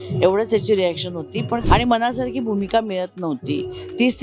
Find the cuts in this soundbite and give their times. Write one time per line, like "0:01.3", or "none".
0:01.6